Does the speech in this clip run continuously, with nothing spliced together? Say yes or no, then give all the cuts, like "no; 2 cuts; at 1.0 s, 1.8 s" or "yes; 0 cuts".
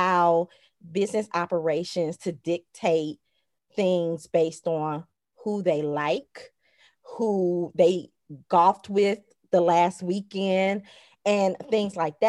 yes; 0 cuts